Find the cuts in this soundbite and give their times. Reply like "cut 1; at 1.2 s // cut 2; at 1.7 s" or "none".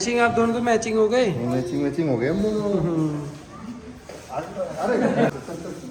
none